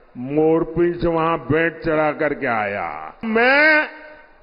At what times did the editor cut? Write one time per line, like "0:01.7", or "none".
0:03.2